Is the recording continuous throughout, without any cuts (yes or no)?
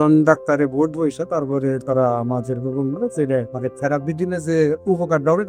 no